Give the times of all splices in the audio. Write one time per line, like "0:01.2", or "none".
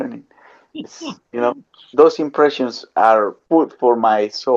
0:01.8
0:03.4